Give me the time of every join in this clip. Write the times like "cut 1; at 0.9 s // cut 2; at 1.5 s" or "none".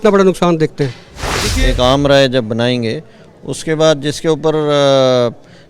cut 1; at 1.5 s